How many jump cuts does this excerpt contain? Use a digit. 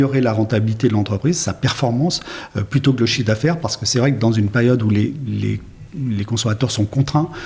0